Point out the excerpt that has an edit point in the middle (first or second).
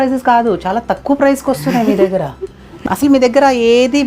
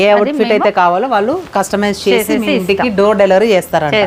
first